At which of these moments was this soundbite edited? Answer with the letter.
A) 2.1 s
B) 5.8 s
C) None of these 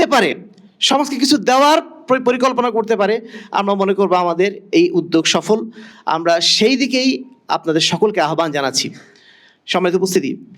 C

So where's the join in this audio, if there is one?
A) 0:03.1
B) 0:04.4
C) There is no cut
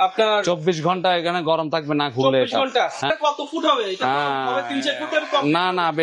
A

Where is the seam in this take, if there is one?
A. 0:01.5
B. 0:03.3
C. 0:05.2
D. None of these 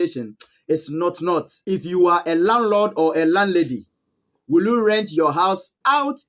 A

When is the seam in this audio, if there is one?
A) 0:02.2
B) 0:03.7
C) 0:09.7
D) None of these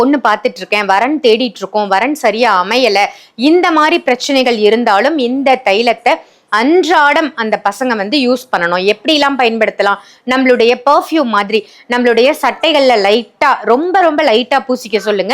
D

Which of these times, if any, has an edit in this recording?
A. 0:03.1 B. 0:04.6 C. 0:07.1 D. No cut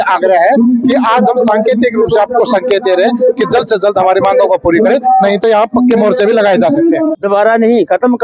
C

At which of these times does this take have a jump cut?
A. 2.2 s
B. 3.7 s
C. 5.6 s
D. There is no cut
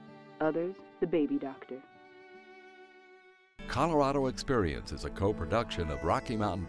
B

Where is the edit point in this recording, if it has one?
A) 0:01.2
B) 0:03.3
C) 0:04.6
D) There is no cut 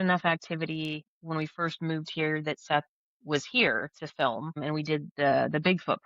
C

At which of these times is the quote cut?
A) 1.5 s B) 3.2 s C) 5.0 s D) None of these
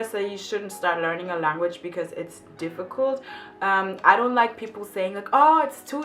D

